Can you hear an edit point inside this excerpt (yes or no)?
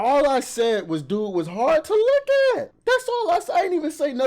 yes